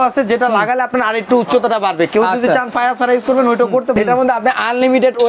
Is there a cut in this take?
yes; 1 cut; at 4.0 s

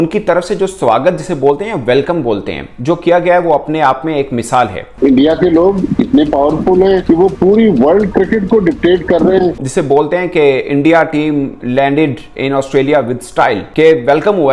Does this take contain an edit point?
yes; 2 cuts; at 4.9 s, 9.6 s

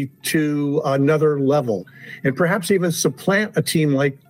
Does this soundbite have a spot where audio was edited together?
yes; 1 cut; at 1.8 s

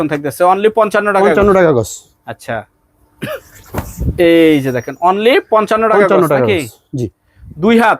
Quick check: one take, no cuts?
yes; 0 cuts

